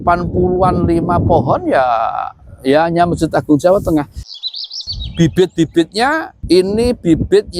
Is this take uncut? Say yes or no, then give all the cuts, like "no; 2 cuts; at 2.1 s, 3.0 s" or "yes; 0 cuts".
no; 2 cuts; at 4.4 s, 6.3 s